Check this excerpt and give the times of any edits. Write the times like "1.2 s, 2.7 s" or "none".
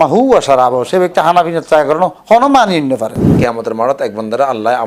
3.3 s

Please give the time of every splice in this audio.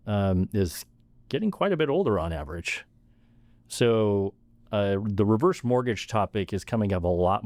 none

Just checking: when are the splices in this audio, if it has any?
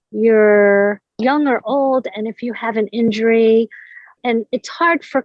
4.2 s

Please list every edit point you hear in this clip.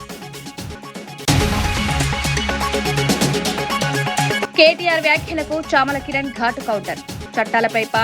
1.1 s, 4.4 s

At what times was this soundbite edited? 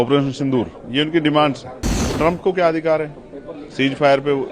2.0 s

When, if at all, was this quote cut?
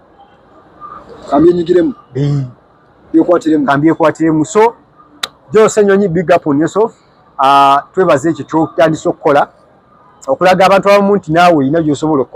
none

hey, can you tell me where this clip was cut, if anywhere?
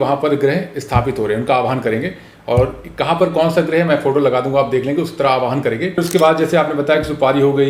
6.0 s

